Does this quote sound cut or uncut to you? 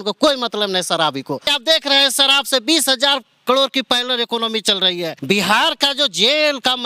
cut